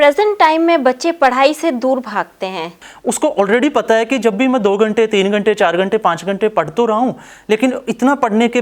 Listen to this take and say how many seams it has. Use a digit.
1